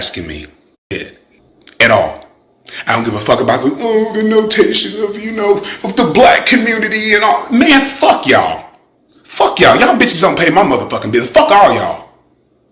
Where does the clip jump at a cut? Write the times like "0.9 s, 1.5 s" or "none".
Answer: 0.9 s